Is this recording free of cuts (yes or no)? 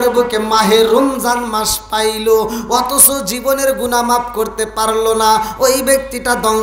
yes